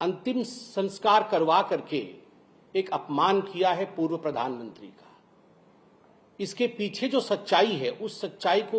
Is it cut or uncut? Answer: uncut